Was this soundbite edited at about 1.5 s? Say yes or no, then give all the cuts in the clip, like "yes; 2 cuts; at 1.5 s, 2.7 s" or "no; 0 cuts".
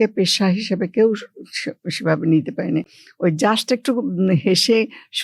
no; 1 cut; at 2.9 s